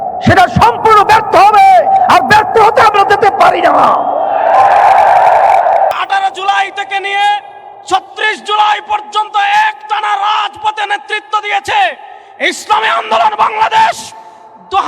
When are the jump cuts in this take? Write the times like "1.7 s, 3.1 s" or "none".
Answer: 5.9 s